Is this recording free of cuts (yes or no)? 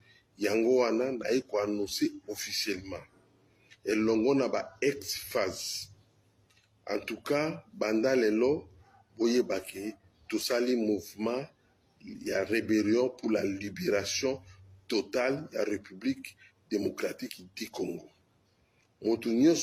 yes